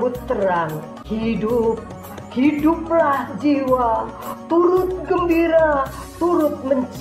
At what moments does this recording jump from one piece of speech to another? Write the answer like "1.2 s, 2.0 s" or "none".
0.9 s